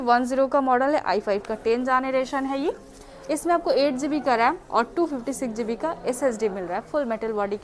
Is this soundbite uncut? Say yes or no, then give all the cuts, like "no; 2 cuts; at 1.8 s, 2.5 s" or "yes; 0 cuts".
yes; 0 cuts